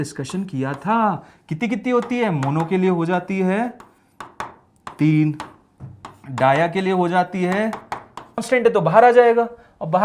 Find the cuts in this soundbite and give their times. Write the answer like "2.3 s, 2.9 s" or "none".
8.4 s